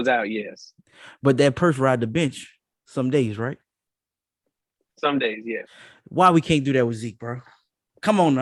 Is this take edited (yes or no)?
no